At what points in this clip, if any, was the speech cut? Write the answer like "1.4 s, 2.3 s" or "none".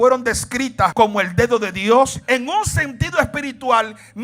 0.9 s, 2.2 s